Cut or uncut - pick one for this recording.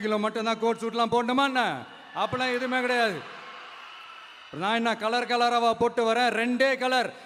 uncut